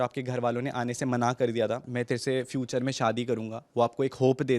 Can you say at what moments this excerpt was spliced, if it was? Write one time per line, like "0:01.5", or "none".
0:01.9